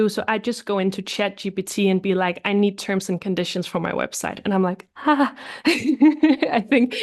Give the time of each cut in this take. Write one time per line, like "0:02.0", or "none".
none